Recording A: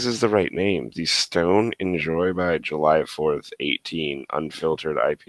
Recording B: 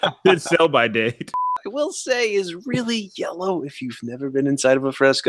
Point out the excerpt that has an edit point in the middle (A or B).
B